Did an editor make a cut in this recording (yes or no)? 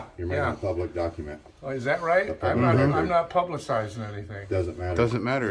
no